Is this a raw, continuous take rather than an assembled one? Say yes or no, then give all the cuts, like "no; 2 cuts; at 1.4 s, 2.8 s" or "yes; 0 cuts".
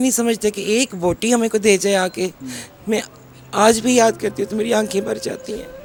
yes; 0 cuts